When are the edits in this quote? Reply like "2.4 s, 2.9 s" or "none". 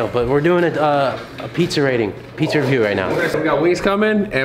3.3 s